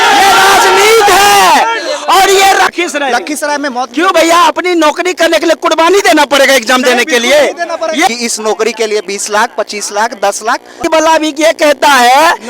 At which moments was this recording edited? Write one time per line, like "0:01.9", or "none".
0:02.7
0:08.1
0:10.9